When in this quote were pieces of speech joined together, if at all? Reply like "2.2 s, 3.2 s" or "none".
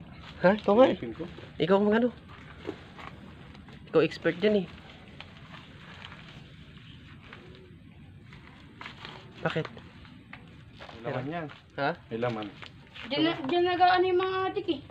11.1 s